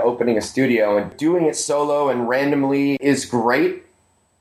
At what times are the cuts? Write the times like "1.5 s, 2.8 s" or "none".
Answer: 1.1 s, 3.0 s